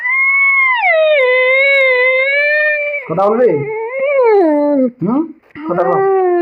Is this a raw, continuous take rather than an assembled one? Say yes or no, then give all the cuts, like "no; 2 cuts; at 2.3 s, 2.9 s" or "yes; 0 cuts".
yes; 0 cuts